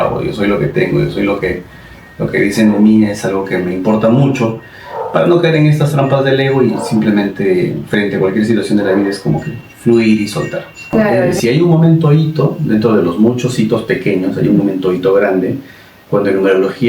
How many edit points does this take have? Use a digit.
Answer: 1